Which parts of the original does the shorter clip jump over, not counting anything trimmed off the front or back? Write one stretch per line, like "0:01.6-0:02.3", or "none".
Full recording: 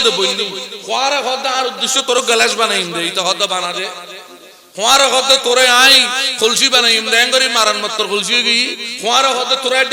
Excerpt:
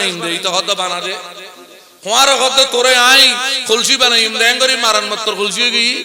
none